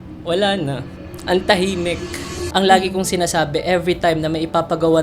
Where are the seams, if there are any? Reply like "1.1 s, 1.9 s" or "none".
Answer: 2.3 s